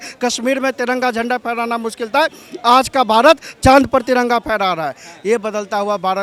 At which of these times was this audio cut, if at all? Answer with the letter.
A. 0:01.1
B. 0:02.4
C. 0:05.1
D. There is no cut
D